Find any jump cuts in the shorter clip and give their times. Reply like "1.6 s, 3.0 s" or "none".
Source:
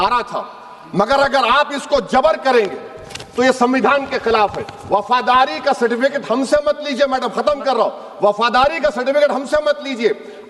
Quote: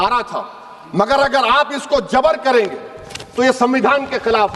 none